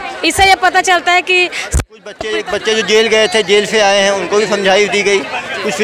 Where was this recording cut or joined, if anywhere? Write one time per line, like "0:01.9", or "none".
0:02.2